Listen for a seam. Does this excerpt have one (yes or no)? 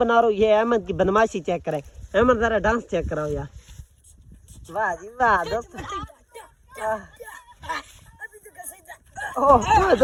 no